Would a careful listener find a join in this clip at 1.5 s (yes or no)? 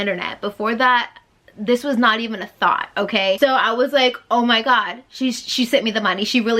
no